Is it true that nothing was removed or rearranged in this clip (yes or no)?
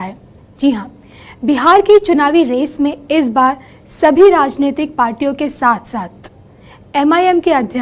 yes